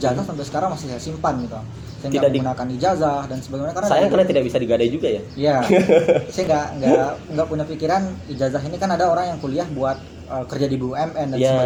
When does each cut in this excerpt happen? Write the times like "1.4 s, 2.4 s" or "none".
none